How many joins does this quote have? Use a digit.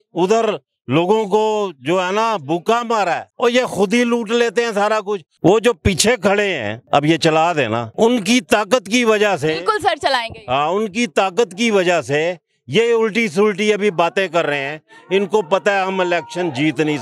4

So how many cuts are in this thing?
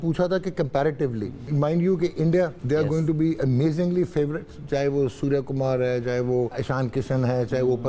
3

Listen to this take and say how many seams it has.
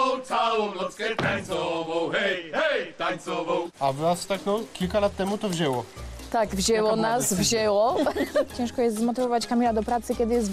2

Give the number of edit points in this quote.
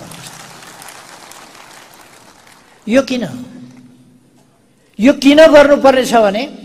0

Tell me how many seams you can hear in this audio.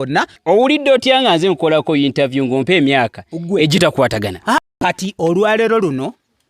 1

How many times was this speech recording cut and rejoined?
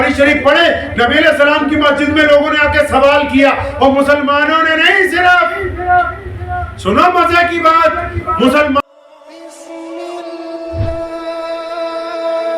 1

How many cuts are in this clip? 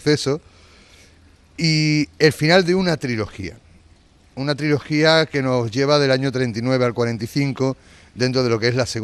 0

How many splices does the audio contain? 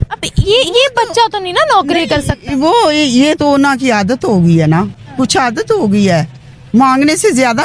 0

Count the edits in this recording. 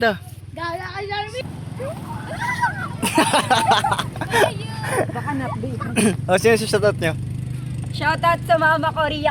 1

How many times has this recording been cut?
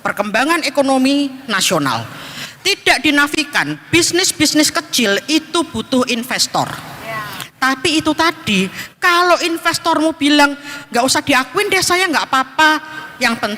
0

